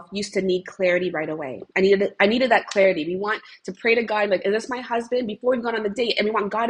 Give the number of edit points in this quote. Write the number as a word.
zero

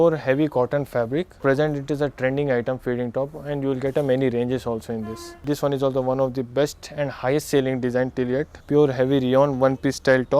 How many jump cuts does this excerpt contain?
three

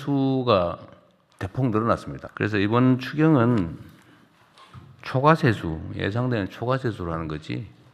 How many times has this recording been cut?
one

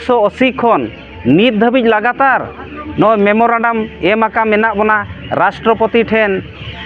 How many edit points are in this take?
zero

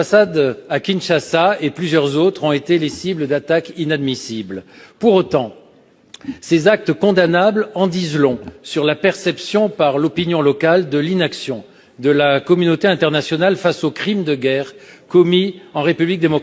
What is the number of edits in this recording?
zero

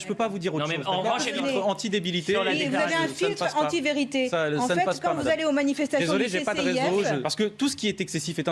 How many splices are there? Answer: two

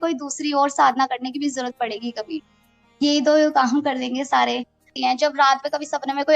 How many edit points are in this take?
one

